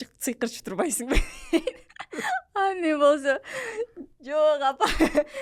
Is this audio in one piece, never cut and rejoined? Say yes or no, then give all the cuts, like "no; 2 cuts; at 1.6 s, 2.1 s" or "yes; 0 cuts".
yes; 0 cuts